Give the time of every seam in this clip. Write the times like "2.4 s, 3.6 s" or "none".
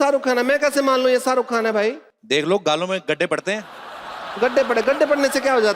2.1 s